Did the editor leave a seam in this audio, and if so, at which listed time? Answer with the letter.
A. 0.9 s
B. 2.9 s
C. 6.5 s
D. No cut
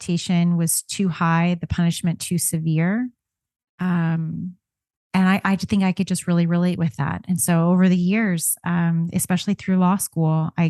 D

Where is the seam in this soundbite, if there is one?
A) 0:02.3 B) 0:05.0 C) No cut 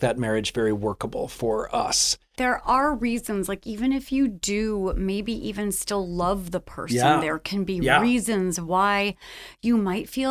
A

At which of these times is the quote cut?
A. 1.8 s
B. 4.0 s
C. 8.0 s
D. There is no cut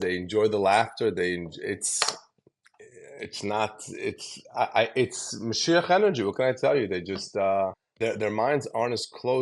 C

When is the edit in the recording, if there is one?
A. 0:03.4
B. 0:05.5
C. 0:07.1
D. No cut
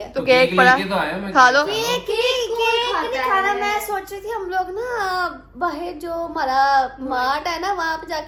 D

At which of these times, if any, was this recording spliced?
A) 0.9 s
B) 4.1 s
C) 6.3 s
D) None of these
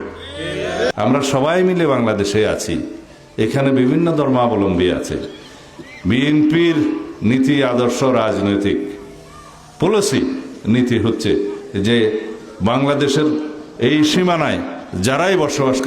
A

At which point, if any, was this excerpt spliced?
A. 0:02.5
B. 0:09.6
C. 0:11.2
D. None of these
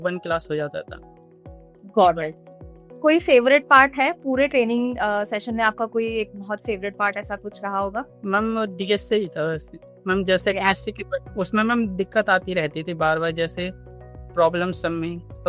D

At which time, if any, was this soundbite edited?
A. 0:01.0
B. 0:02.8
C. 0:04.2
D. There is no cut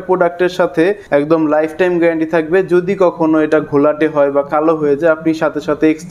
A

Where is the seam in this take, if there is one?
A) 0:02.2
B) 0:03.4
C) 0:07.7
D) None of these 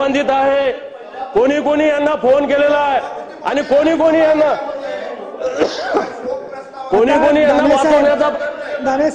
D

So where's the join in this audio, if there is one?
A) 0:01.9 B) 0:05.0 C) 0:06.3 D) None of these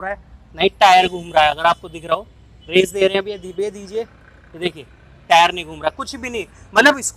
D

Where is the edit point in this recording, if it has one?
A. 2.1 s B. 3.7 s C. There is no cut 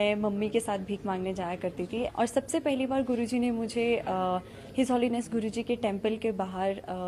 A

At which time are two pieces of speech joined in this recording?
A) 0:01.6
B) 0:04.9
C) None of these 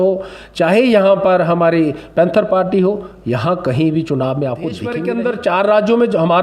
B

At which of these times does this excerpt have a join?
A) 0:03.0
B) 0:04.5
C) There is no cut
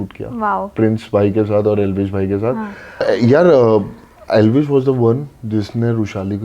A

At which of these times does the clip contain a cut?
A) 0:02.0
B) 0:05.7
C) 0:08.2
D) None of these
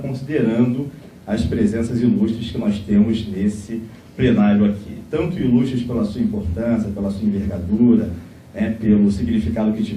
A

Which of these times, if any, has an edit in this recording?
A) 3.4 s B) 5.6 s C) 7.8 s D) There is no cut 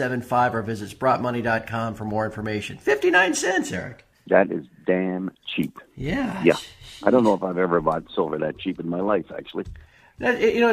A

